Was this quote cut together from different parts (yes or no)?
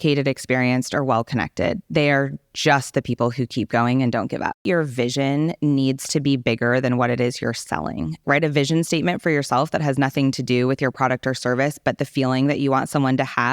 yes